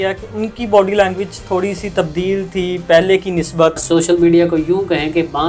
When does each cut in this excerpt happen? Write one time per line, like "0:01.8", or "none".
0:03.8